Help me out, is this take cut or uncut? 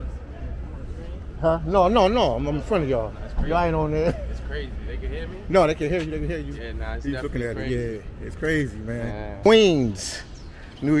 cut